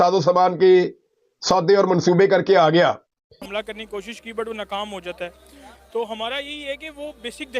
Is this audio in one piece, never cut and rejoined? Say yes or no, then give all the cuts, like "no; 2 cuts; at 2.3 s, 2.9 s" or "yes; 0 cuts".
no; 1 cut; at 3.1 s